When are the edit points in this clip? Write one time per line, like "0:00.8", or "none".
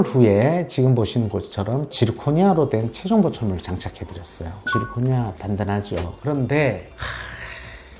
none